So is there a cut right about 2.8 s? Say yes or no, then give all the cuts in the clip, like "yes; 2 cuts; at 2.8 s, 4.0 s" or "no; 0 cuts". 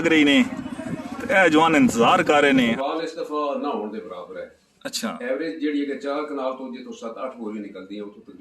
yes; 1 cut; at 2.8 s